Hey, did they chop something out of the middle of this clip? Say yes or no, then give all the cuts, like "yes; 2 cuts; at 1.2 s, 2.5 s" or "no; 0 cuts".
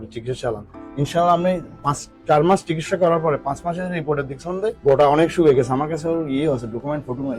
no; 0 cuts